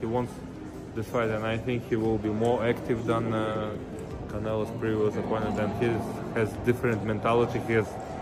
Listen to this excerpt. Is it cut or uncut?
uncut